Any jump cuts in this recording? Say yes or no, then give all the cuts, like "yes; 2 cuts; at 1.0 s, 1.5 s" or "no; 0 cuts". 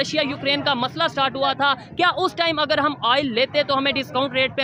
no; 0 cuts